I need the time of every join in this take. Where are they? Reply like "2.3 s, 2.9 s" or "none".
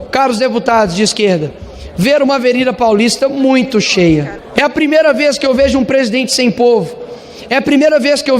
4.4 s